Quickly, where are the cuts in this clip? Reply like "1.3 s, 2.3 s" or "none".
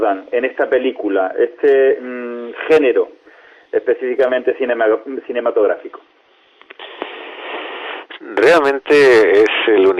none